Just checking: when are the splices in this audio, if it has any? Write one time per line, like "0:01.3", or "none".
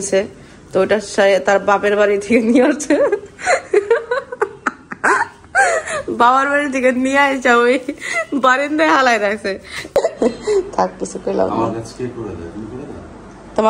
0:10.0